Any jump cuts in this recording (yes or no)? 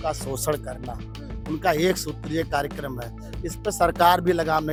no